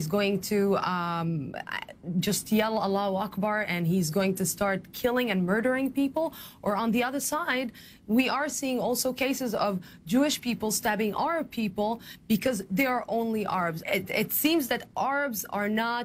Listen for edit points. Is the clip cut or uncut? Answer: cut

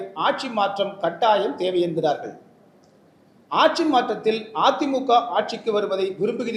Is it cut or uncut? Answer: uncut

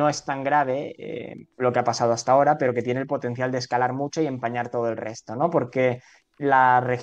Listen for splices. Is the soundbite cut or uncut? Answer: uncut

